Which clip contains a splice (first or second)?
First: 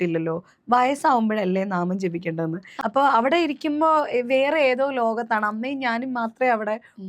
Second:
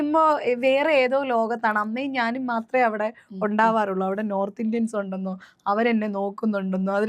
first